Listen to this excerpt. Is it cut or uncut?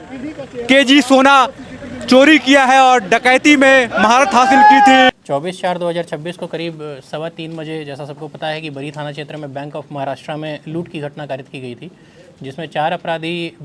uncut